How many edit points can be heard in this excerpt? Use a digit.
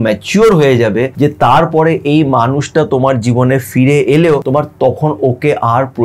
2